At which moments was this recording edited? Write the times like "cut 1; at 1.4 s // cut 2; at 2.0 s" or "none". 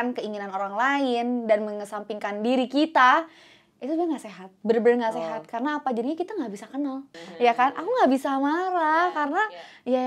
cut 1; at 7.2 s

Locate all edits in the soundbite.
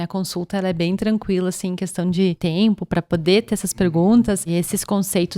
cut 1; at 2.4 s // cut 2; at 4.5 s

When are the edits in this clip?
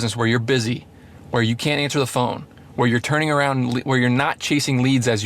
none

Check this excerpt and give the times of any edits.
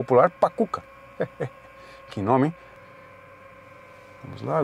cut 1; at 2.8 s

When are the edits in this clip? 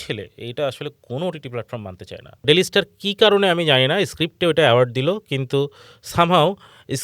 cut 1; at 2.4 s

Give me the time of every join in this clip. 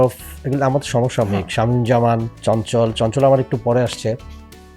cut 1; at 2.3 s

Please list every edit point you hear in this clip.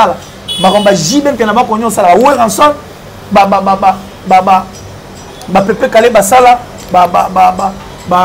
none

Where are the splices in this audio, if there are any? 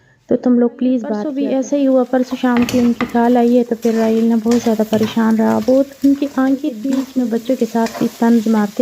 cut 1; at 1.3 s // cut 2; at 7.0 s

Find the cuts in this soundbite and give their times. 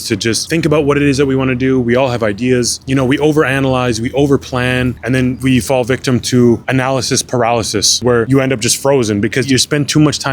cut 1; at 8.0 s

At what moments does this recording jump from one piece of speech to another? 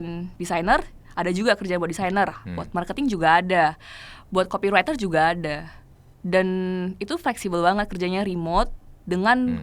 none

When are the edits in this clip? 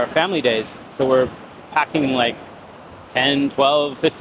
none

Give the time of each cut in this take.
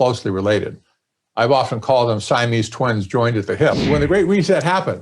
cut 1; at 3.8 s

